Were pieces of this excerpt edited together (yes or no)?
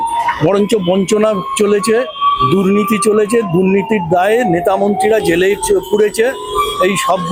no